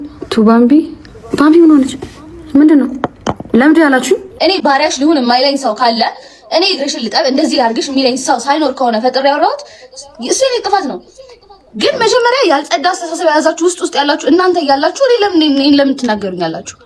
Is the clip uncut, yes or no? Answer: yes